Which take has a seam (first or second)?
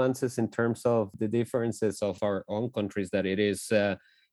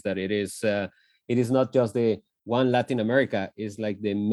first